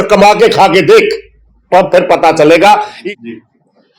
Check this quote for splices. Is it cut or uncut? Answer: cut